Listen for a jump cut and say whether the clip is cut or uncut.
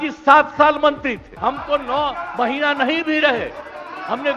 cut